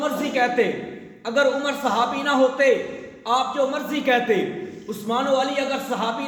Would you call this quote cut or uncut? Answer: uncut